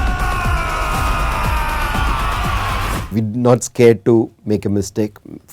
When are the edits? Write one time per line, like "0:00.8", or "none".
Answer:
0:03.1